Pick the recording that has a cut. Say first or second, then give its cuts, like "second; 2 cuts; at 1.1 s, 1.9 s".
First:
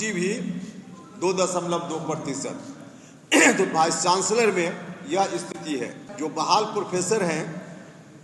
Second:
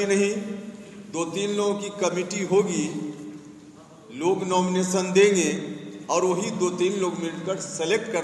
first; 1 cut; at 6.0 s